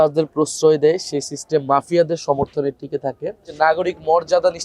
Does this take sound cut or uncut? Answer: cut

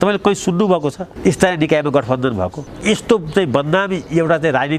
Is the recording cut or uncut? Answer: cut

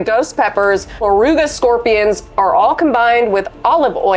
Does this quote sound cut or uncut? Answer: cut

